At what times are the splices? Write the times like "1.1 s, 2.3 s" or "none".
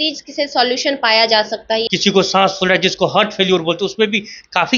1.9 s